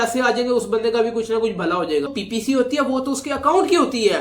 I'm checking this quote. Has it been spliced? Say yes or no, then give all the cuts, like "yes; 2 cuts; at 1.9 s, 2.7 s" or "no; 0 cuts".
yes; 1 cut; at 2.1 s